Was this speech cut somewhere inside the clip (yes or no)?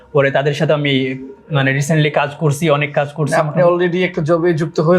no